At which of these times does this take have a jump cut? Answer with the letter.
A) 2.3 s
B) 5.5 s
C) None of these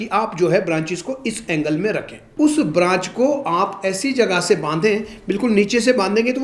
A